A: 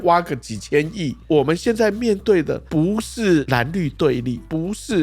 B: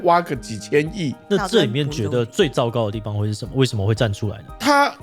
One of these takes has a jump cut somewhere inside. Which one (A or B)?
A